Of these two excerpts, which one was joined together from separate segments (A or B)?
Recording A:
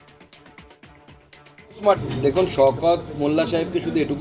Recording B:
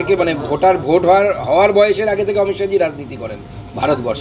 A